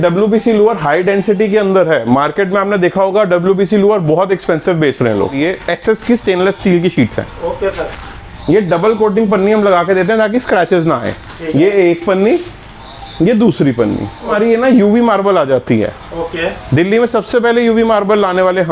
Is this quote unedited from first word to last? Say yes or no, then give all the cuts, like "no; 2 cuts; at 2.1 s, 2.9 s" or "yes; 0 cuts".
no; 2 cuts; at 5.4 s, 14.3 s